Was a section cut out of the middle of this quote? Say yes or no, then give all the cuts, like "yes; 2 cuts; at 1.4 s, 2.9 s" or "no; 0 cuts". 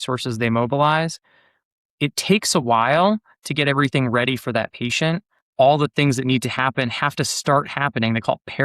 yes; 2 cuts; at 1.6 s, 5.4 s